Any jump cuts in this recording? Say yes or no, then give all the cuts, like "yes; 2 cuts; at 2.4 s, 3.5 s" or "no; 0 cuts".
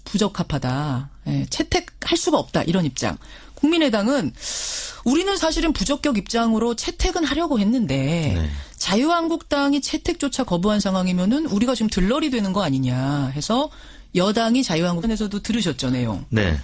no; 0 cuts